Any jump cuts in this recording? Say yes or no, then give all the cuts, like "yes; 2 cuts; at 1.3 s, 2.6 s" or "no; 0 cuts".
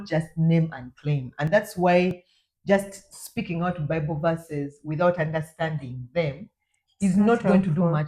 no; 0 cuts